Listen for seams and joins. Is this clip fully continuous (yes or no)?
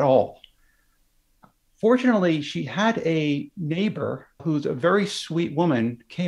no